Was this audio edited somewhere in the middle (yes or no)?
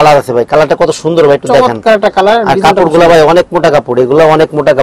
no